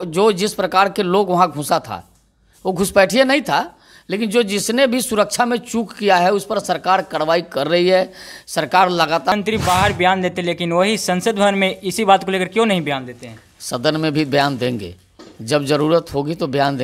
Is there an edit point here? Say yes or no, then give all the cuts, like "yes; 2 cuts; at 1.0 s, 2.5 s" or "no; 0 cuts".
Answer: yes; 1 cut; at 9.3 s